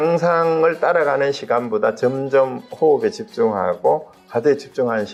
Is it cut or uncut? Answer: uncut